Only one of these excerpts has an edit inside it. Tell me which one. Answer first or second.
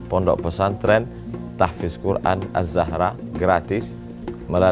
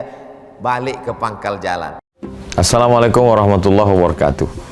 second